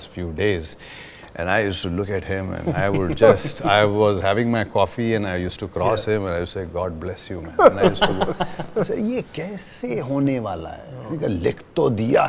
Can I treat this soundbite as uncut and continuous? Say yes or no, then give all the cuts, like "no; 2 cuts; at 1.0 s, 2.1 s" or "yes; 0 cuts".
yes; 0 cuts